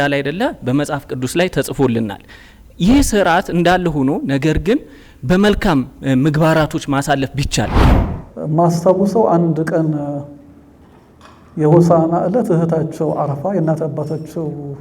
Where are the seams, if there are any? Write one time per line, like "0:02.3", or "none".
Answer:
0:07.8